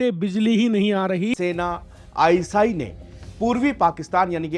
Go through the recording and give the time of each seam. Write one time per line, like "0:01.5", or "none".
0:01.4